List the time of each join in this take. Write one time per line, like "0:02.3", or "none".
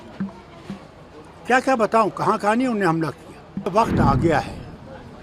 0:03.7